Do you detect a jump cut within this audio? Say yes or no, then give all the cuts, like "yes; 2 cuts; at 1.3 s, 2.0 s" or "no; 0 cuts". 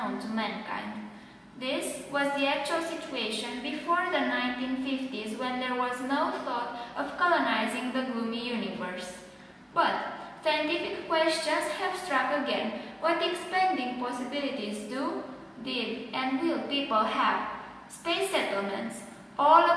yes; 1 cut; at 10.9 s